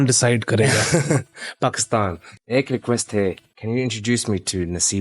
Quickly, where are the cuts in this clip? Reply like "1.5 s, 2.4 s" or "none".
2.3 s, 3.5 s